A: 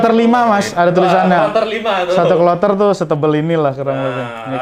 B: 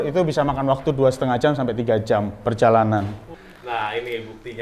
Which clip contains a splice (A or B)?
B